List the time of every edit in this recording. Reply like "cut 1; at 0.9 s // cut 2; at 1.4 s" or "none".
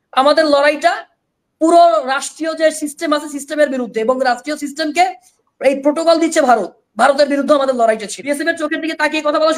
cut 1; at 8.1 s

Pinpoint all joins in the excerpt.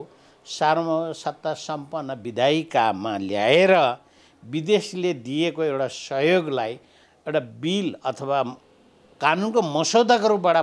none

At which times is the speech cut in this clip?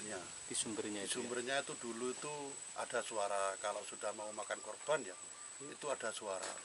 none

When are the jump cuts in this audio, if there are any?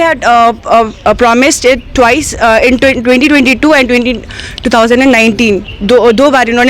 none

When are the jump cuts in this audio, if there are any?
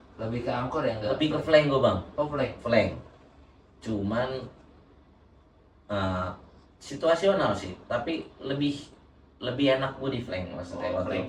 none

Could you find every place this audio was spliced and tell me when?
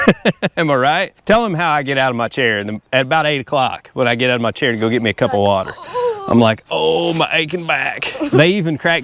cut 1; at 1.1 s // cut 2; at 2.8 s

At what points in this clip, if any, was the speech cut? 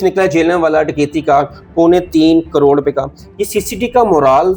none

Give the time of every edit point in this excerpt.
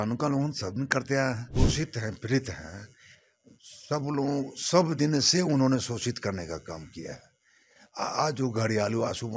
cut 1; at 1.5 s

